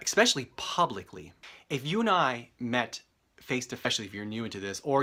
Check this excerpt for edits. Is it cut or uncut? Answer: uncut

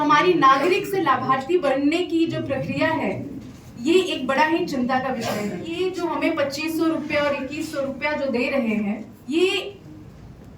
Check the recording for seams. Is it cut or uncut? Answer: cut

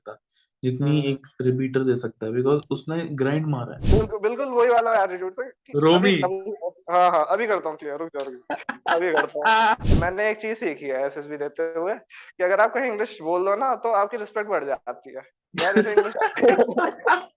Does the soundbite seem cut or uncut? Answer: cut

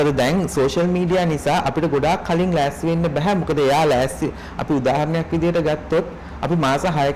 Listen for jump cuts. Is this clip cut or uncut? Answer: uncut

